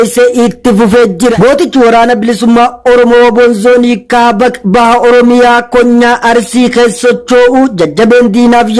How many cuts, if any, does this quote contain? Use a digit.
1